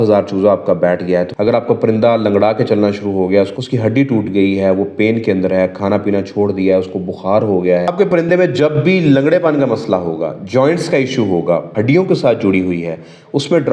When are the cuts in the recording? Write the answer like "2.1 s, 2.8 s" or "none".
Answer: 1.3 s, 3.6 s, 7.9 s, 11.7 s